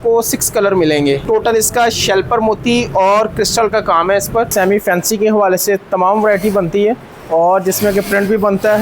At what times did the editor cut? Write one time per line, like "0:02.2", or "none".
0:01.2
0:04.5